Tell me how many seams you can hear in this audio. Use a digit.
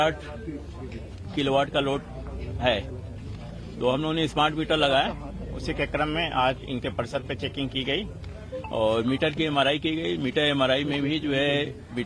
1